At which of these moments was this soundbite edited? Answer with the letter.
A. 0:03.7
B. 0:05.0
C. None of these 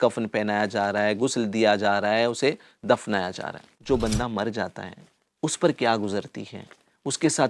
A